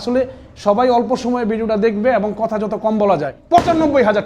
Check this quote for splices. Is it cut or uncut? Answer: cut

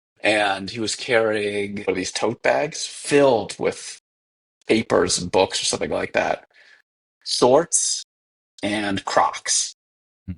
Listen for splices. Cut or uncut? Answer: cut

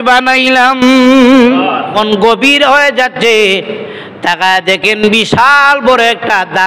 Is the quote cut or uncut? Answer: cut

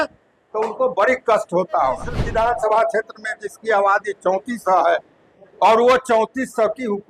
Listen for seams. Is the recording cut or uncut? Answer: cut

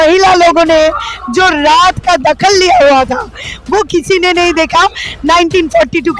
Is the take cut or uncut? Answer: uncut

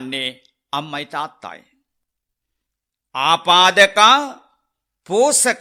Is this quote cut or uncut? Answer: uncut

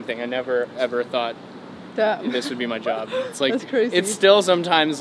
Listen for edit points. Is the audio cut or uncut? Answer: uncut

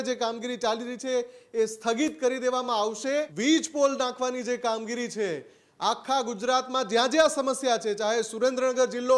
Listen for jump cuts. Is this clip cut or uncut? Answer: cut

